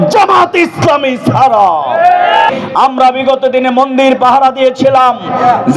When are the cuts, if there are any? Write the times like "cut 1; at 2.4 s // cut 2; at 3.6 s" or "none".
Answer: cut 1; at 2.5 s